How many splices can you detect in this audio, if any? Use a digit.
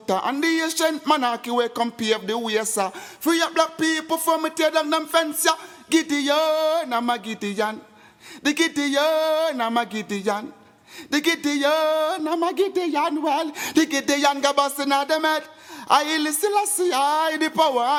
0